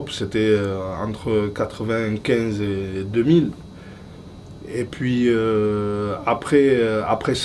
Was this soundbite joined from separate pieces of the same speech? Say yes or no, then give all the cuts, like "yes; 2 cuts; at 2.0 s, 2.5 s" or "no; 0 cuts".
yes; 1 cut; at 6.5 s